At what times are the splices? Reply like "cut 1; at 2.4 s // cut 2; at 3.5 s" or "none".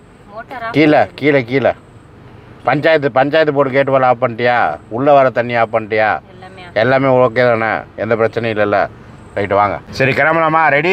cut 1; at 9.9 s